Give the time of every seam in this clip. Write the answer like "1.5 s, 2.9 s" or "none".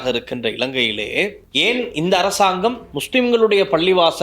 1.4 s, 2.9 s